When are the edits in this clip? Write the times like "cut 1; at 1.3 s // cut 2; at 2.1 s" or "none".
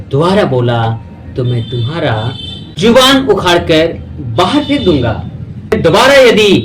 cut 1; at 5.8 s